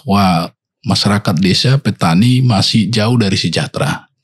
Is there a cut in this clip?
no; 0 cuts

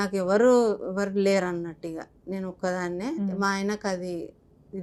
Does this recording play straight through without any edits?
yes; 0 cuts

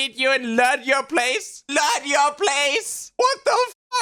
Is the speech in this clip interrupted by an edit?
no; 0 cuts

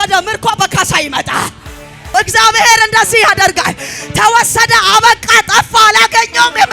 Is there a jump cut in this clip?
yes; 1 cut; at 2.1 s

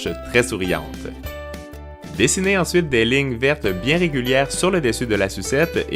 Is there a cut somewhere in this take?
yes; 1 cut; at 4.1 s

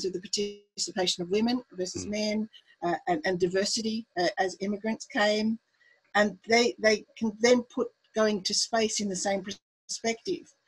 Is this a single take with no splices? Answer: yes; 0 cuts

